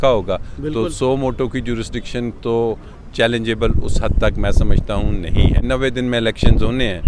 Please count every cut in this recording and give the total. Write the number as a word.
one